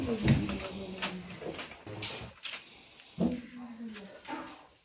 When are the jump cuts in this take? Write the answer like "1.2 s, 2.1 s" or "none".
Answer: 1.8 s